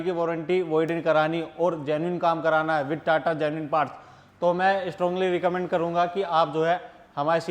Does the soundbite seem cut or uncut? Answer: uncut